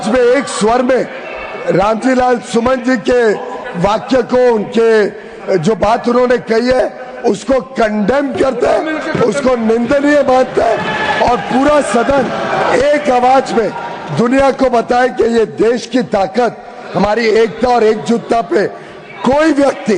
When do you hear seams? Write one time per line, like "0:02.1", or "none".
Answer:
none